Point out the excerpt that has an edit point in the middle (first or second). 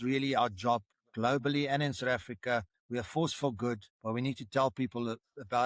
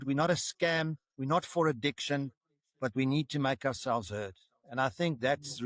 first